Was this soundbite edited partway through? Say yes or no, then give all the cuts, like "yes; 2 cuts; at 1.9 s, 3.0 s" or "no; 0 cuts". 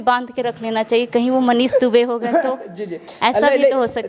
no; 0 cuts